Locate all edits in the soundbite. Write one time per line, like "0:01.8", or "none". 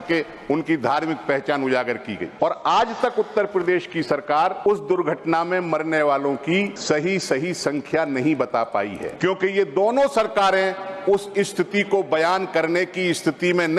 0:02.3
0:04.7
0:06.7
0:09.0